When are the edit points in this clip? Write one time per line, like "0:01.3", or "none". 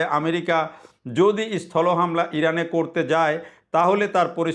none